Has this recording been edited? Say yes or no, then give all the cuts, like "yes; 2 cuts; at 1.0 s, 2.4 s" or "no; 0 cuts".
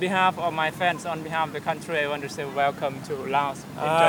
no; 0 cuts